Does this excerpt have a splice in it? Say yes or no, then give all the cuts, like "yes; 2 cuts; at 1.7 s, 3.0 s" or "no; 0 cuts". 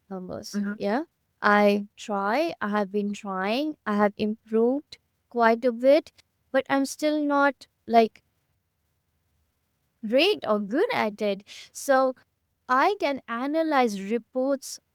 no; 0 cuts